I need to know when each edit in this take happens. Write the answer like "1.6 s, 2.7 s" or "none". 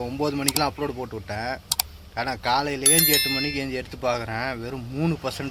none